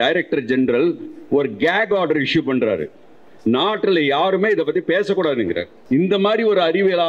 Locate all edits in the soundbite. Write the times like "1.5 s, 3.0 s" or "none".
5.7 s